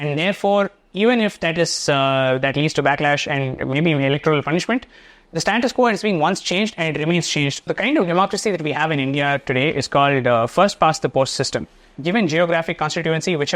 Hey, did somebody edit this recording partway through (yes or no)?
yes